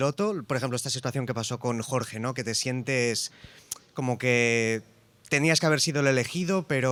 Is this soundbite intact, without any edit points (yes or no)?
yes